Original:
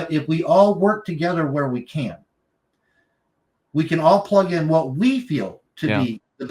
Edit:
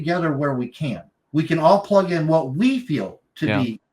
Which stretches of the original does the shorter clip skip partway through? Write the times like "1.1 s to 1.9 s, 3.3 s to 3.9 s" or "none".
2.3 s to 3.5 s